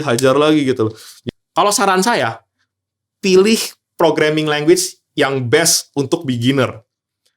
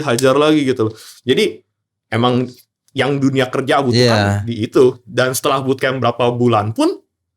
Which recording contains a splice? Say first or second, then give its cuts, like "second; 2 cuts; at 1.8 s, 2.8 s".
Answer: first; 1 cut; at 1.2 s